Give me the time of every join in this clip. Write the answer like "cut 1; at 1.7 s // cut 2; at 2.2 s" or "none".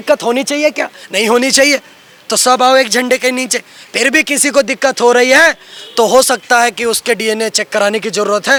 none